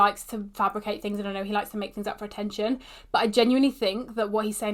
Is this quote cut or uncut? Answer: uncut